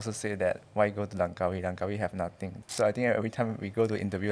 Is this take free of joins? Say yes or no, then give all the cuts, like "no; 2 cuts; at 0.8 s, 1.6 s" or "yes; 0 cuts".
no; 1 cut; at 2.6 s